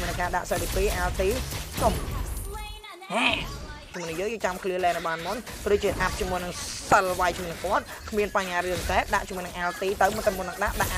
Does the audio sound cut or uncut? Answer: cut